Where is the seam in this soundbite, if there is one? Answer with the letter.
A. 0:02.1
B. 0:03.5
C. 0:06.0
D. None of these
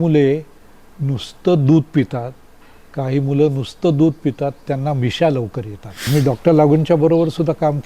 C